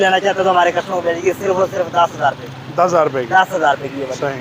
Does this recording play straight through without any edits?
yes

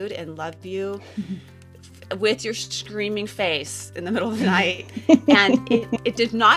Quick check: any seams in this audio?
no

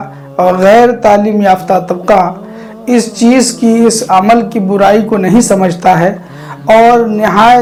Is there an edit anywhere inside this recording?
no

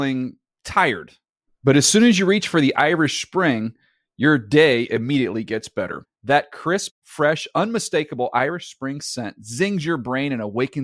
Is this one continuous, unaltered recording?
yes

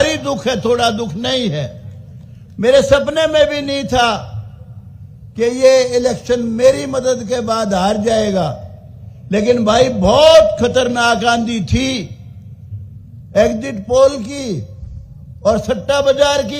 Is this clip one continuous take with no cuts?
yes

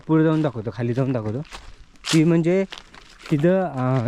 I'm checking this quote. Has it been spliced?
no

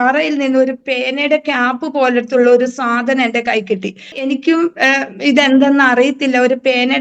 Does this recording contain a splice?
yes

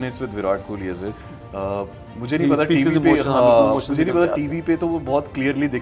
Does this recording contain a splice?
no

